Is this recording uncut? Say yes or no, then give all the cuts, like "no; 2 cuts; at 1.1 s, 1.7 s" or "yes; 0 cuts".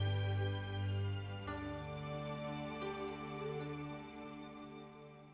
yes; 0 cuts